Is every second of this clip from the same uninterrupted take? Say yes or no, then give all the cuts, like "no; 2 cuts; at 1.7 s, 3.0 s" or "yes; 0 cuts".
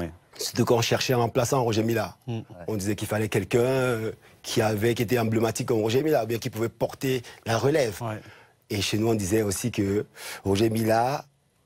yes; 0 cuts